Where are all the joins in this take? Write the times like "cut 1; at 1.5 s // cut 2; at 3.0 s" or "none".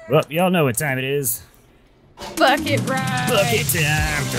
none